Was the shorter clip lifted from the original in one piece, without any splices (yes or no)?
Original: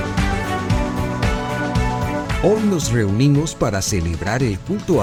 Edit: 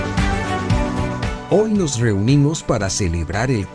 no